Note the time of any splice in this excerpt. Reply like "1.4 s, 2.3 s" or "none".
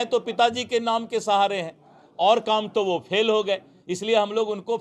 none